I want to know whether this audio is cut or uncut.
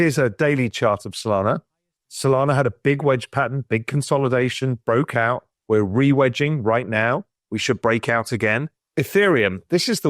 cut